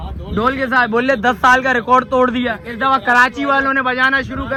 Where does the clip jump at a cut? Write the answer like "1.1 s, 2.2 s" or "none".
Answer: none